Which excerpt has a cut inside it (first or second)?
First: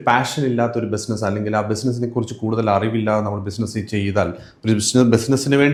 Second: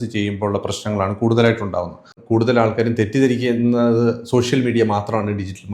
second